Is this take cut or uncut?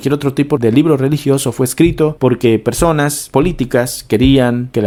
uncut